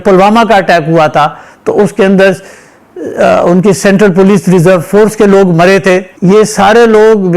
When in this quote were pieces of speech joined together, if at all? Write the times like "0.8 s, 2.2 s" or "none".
6.1 s